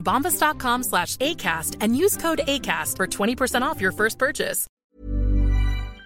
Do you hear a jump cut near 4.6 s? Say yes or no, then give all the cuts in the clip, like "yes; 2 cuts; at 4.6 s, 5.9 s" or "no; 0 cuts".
yes; 1 cut; at 4.6 s